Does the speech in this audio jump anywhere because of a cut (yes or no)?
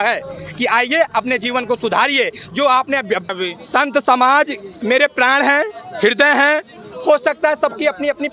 yes